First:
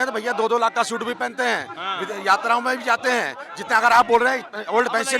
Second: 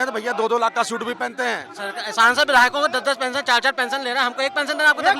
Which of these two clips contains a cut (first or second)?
second